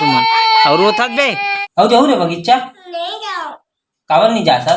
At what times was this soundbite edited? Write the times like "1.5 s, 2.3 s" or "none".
1.3 s